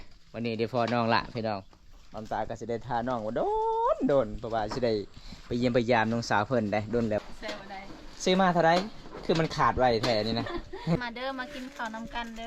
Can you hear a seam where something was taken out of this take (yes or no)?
yes